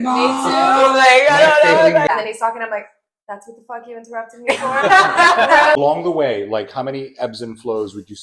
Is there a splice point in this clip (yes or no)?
yes